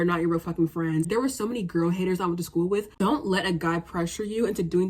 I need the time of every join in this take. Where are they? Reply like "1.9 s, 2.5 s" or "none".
1.1 s, 2.9 s